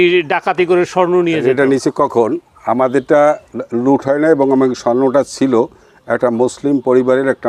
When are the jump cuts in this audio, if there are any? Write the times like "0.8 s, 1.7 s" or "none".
none